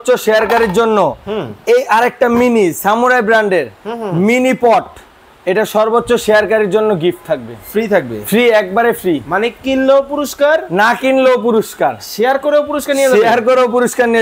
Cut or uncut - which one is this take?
uncut